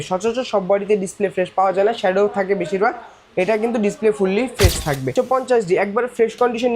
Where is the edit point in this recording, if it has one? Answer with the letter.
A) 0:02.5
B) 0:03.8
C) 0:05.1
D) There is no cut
C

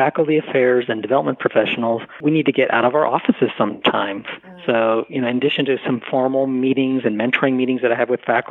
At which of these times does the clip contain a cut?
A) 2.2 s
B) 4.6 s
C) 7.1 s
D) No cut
A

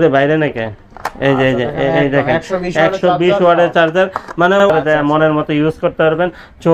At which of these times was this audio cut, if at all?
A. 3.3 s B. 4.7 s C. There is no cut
B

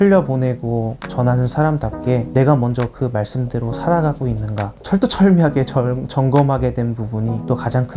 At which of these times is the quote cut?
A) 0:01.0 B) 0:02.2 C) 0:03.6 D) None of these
D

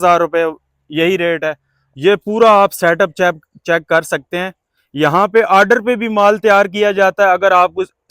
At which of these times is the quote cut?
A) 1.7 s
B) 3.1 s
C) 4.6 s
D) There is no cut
A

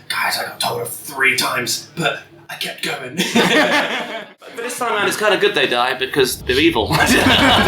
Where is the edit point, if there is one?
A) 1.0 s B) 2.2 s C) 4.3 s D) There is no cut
C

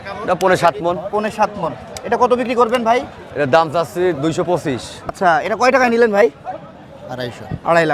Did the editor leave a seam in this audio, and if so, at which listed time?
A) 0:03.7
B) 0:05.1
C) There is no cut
B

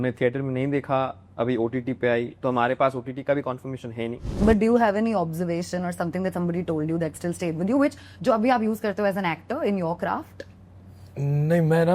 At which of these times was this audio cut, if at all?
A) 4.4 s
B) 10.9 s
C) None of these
A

